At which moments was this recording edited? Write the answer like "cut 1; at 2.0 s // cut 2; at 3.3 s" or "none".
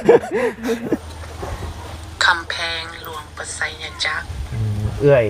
cut 1; at 1.0 s